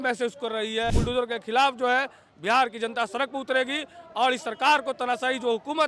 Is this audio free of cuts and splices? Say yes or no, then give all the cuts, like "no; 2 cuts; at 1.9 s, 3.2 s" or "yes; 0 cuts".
no; 1 cut; at 1.0 s